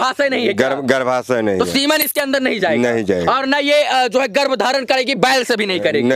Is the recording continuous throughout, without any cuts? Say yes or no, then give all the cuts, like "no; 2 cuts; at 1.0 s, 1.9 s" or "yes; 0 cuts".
yes; 0 cuts